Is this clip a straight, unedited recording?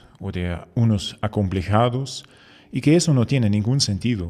yes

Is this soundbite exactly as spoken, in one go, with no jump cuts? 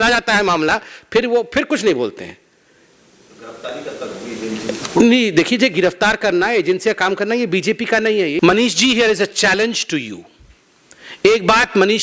no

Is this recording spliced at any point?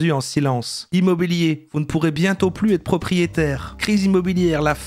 yes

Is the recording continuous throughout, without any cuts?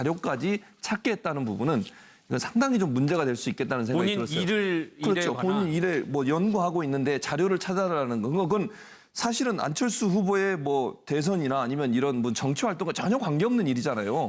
no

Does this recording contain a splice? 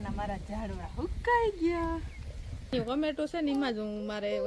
yes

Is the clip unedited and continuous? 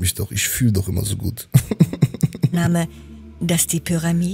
yes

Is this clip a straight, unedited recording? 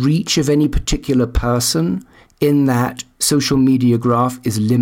yes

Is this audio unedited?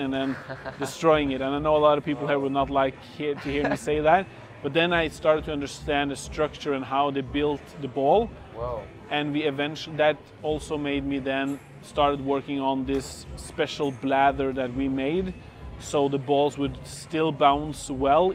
yes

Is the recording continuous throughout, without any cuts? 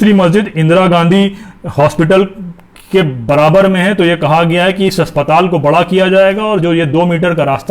yes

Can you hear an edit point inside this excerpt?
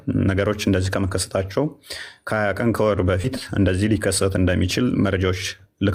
no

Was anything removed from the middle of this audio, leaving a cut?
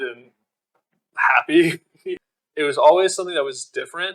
yes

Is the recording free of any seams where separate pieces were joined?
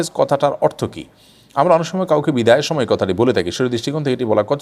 yes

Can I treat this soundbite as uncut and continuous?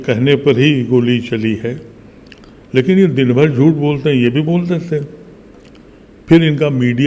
yes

